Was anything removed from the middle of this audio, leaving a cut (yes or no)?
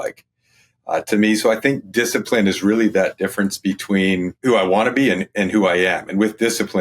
yes